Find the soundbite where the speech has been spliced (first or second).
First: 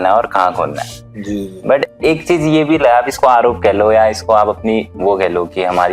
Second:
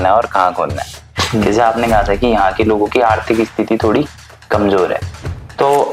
second